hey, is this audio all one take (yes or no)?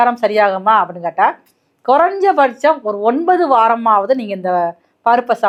yes